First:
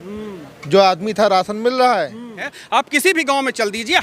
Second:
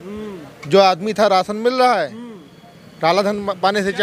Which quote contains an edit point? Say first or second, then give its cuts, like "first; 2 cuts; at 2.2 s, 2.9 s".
first; 1 cut; at 2.5 s